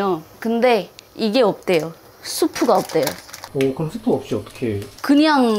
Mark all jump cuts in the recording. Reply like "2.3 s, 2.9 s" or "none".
3.4 s